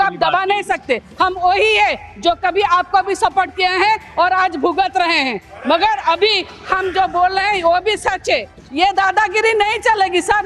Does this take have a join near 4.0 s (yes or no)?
no